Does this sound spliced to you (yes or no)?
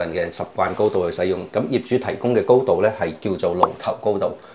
no